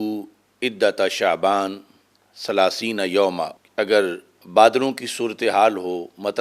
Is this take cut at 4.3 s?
yes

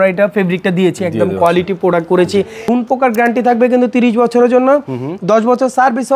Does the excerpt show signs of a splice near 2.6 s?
yes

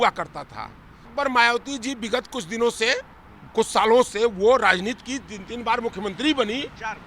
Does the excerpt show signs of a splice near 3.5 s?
no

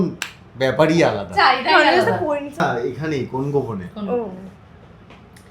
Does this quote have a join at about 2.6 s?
no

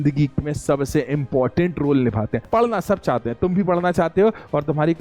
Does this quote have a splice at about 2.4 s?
yes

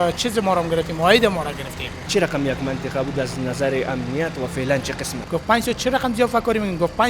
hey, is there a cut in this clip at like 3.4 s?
no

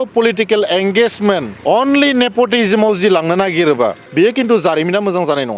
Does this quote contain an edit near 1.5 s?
yes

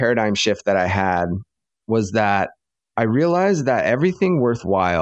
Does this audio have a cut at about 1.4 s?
no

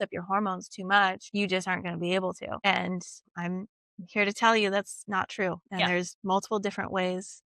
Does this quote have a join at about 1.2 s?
yes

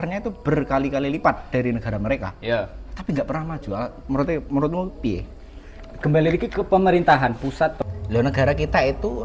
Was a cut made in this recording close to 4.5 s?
no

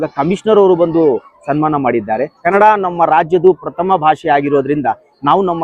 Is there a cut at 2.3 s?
yes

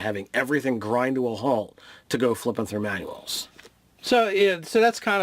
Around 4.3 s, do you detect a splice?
yes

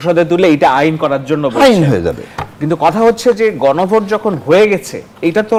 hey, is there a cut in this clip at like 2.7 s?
no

